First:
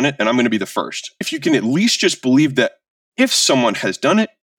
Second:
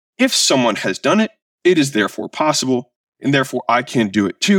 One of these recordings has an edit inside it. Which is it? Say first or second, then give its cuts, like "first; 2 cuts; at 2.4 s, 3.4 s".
first; 1 cut; at 1.2 s